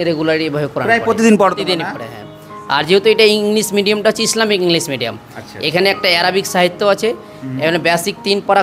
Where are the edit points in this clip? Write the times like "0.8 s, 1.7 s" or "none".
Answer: none